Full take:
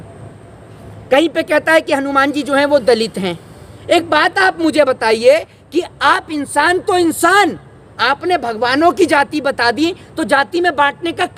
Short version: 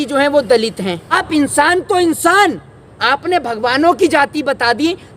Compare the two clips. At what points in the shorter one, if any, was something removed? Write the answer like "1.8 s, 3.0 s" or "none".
1.1 s